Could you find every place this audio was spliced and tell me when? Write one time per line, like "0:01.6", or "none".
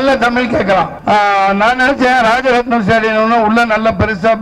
0:00.9